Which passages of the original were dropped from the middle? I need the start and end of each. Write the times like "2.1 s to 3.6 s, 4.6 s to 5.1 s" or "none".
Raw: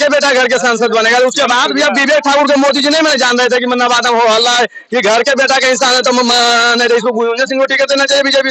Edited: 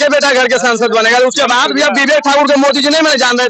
none